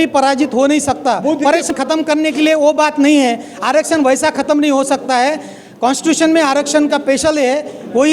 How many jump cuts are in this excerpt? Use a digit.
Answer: 1